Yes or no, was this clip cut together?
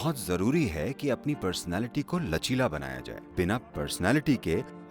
yes